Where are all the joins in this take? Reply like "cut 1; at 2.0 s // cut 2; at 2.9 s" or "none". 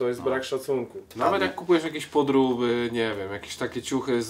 cut 1; at 1.1 s